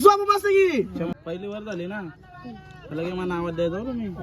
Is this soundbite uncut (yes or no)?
no